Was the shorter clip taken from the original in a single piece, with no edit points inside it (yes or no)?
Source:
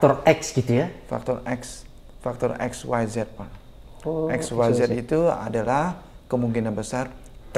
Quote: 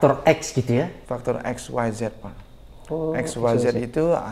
no